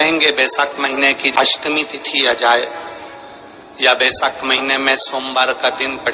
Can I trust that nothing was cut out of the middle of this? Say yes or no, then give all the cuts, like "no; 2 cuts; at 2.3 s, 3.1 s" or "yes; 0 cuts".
no; 1 cut; at 1.3 s